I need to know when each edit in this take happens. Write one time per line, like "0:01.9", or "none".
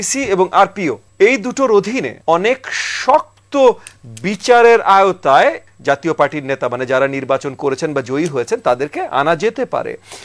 0:01.0
0:02.1
0:05.7

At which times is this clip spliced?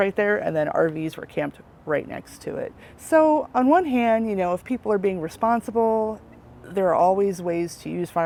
none

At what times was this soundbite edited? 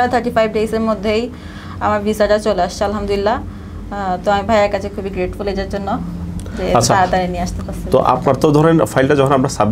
none

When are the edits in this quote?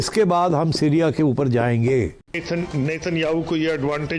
none

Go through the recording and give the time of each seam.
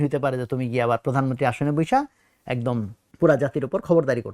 0:03.0

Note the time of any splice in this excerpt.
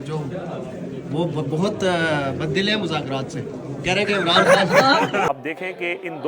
0:05.3

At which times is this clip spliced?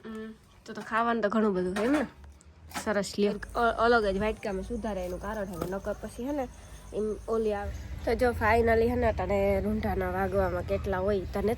0:03.4
0:07.7

